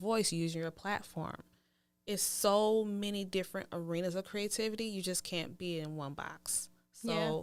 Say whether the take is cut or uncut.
uncut